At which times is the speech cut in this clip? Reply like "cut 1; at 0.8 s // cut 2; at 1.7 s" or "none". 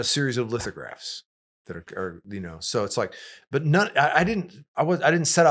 none